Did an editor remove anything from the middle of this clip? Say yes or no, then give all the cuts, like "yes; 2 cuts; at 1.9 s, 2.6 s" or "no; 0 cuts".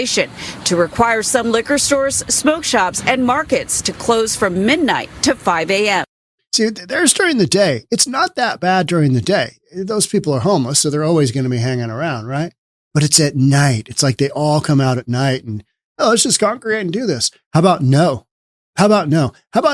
no; 0 cuts